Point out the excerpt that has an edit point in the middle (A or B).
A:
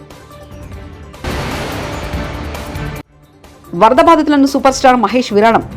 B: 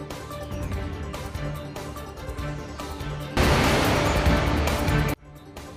A